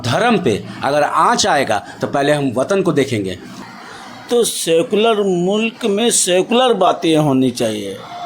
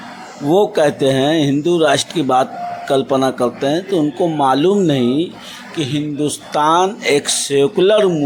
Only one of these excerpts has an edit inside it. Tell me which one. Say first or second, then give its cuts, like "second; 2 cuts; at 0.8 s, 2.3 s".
first; 1 cut; at 3.5 s